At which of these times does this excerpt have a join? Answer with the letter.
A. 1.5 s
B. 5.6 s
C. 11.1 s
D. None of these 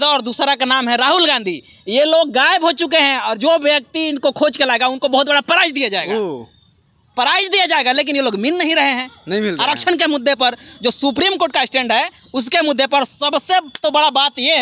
D